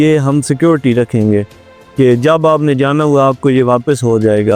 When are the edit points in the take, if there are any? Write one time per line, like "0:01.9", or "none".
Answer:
none